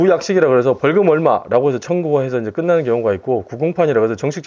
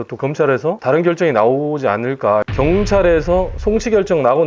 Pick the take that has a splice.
second; 2 cuts; at 0.8 s, 2.5 s

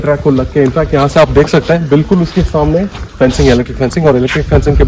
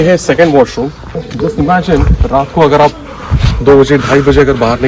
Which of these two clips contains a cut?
second; 1 cut; at 1.2 s

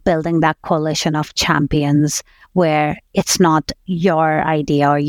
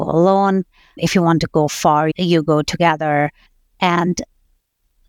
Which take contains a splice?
second; 3 cuts; at 1.0 s, 2.1 s, 3.5 s

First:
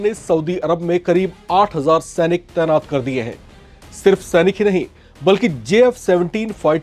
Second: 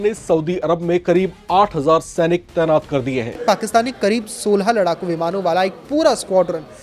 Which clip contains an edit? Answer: second; 1 cut; at 3.4 s

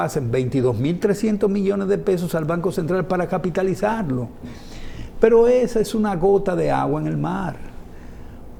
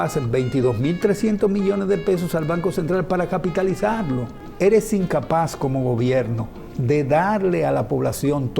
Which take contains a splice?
second; 1 cut; at 4.5 s

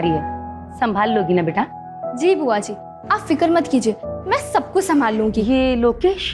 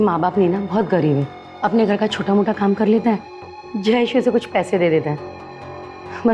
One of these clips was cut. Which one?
first; 1 cut; at 5.4 s

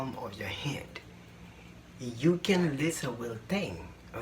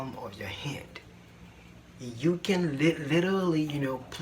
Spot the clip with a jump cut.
first; 1 cut; at 2.8 s

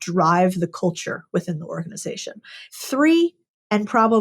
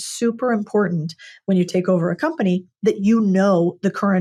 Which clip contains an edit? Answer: first; 1 cut; at 2.6 s

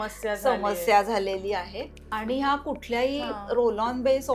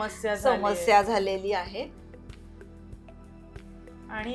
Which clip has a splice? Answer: first; 1 cut; at 2.1 s

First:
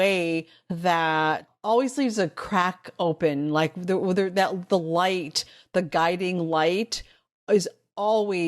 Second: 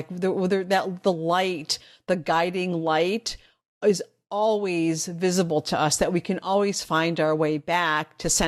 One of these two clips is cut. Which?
first; 1 cut; at 1.5 s

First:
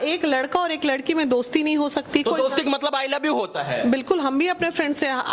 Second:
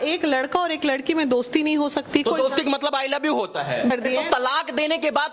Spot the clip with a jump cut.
second; 1 cut; at 3.9 s

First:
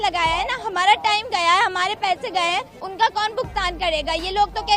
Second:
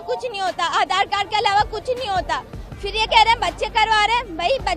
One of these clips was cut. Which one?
first; 1 cut; at 2.8 s

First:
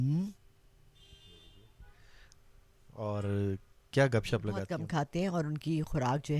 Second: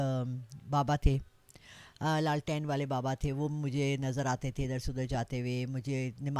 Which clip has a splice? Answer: first; 1 cut; at 4.6 s

